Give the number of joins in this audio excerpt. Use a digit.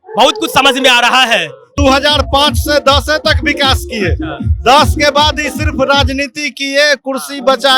1